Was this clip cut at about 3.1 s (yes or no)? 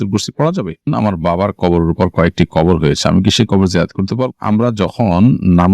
no